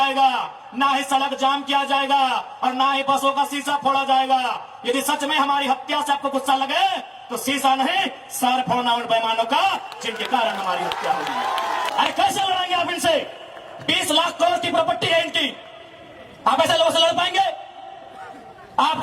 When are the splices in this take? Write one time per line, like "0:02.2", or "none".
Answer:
0:11.9